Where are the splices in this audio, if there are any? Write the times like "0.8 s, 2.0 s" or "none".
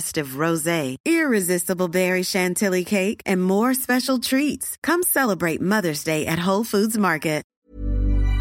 7.5 s